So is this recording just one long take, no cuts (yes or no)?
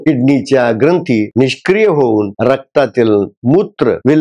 yes